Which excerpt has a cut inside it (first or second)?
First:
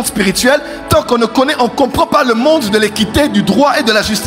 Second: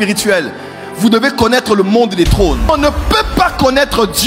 second